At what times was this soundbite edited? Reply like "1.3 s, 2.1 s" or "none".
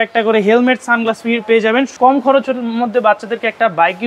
1.9 s